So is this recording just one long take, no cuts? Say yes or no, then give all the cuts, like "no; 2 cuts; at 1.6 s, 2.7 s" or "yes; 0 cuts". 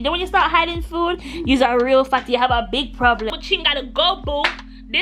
no; 1 cut; at 3.3 s